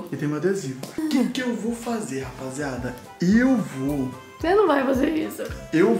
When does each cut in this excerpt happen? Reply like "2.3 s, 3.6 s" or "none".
1.0 s